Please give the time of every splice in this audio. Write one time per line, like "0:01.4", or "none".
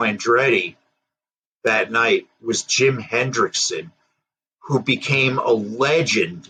none